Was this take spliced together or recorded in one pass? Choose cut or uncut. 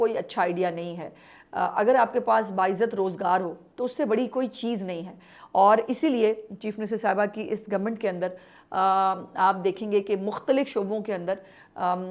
uncut